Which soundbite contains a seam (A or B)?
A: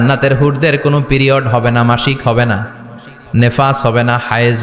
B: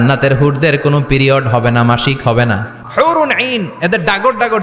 B